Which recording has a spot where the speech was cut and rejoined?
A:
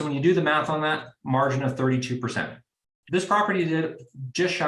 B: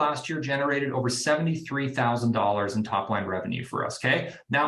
A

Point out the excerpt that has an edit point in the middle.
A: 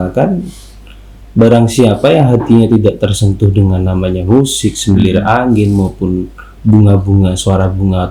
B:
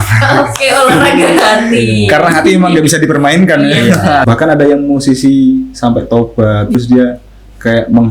B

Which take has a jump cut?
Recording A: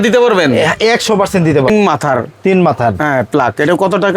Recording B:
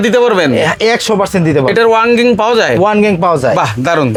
A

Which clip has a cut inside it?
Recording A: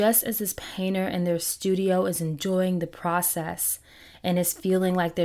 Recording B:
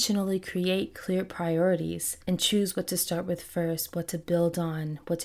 B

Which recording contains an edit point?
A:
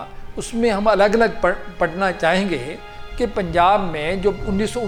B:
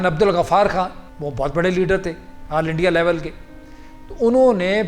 B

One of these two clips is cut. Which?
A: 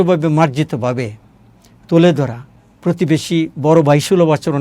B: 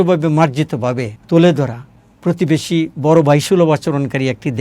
B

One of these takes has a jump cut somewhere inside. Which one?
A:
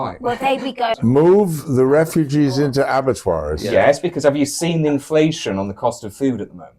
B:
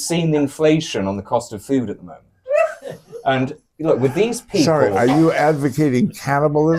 A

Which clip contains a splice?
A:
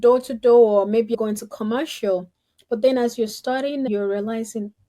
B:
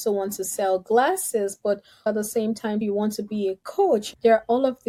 A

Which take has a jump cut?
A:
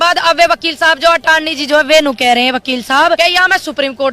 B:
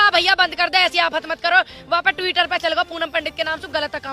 A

